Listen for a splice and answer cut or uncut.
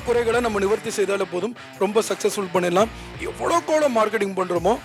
uncut